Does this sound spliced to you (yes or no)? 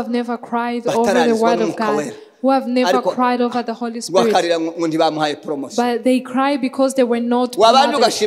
no